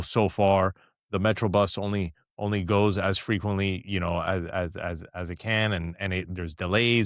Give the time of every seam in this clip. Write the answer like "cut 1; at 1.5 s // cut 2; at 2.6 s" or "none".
none